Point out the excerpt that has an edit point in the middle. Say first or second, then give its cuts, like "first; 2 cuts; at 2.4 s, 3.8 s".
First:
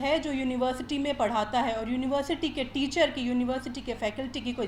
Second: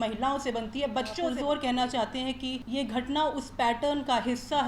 second; 2 cuts; at 1.3 s, 2.6 s